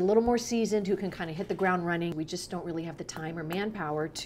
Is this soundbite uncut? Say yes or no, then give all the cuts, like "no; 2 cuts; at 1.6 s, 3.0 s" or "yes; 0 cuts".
no; 1 cut; at 2.1 s